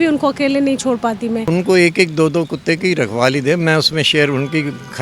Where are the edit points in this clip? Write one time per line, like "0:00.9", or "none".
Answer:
0:01.5